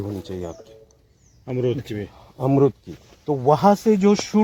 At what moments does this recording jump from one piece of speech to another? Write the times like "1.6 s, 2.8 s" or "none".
none